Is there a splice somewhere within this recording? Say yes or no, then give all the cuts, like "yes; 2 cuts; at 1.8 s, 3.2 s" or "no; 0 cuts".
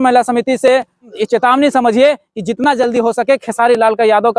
yes; 1 cut; at 1.1 s